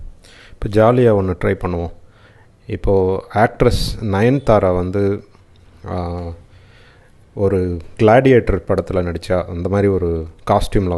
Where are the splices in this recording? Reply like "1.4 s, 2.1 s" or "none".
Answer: none